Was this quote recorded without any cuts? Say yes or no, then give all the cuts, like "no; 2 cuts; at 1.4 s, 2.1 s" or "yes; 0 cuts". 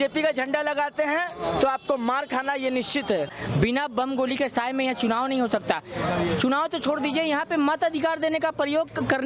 no; 1 cut; at 3.3 s